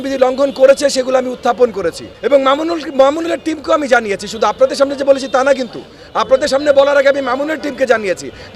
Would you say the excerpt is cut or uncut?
cut